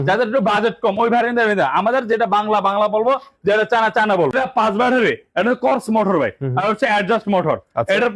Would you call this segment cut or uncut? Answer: cut